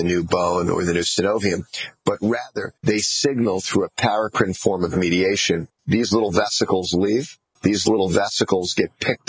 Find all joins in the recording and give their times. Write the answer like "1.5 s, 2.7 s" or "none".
none